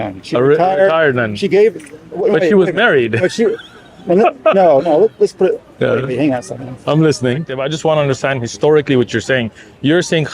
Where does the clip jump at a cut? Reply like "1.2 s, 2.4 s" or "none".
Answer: 7.5 s